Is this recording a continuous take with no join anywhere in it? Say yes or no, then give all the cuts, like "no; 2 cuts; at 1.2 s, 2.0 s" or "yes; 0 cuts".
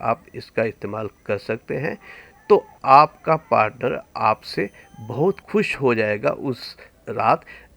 no; 1 cut; at 2.7 s